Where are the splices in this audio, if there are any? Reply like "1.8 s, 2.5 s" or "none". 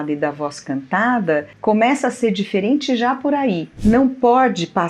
3.7 s